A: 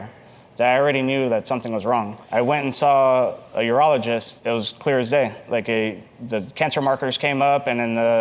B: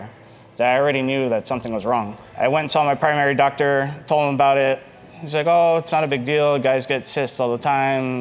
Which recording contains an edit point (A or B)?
A